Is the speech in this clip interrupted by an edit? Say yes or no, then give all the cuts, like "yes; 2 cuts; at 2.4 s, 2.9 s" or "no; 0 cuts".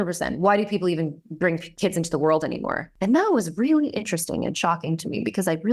yes; 1 cut; at 2.8 s